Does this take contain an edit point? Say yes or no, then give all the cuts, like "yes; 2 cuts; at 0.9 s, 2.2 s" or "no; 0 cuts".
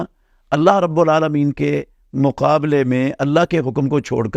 no; 0 cuts